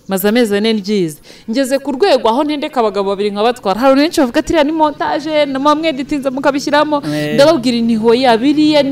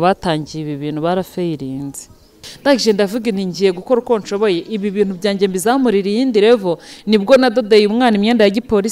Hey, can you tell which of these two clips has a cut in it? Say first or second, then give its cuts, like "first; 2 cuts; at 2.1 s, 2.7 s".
second; 1 cut; at 2.4 s